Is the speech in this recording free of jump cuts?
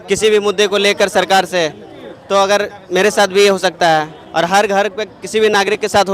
yes; 0 cuts

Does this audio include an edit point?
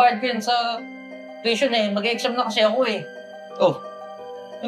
no; 0 cuts

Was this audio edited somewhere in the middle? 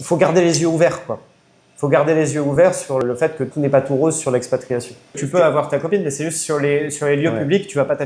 yes; 2 cuts; at 3.0 s, 5.2 s

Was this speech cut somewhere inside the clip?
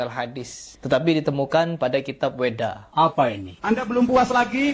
yes; 1 cut; at 3.3 s

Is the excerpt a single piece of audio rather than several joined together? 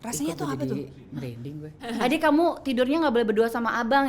no; 1 cut; at 1.9 s

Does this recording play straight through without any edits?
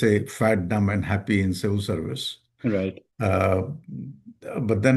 yes; 0 cuts

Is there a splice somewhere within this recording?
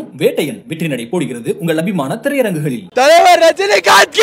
yes; 1 cut; at 2.8 s

